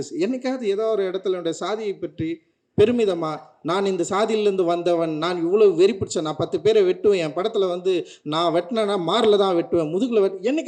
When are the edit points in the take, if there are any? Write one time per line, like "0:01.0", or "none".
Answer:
none